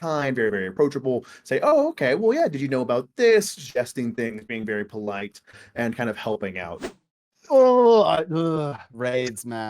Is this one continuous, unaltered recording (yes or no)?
no